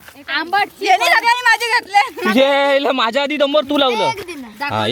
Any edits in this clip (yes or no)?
no